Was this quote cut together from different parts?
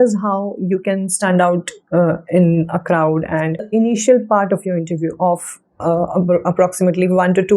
yes; 1 cut; at 3.7 s

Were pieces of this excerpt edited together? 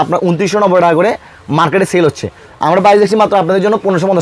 no; 0 cuts

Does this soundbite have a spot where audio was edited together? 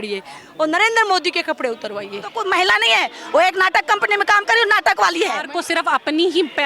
yes; 2 cuts; at 2.4 s, 5.5 s

